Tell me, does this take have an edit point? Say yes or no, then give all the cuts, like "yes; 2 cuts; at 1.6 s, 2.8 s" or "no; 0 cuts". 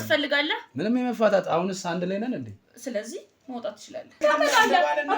yes; 1 cut; at 4.2 s